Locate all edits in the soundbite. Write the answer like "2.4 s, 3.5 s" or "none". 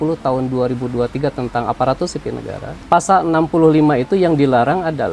2.7 s